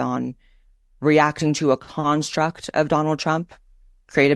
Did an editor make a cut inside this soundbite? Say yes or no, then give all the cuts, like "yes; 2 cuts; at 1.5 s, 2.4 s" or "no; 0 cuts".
yes; 1 cut; at 1.9 s